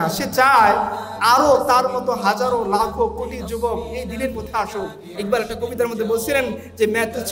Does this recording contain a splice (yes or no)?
yes